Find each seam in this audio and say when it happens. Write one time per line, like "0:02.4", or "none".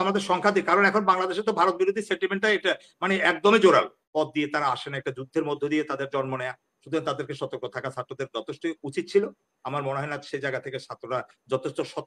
0:04.0

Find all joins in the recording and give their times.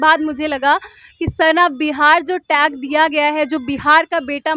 none

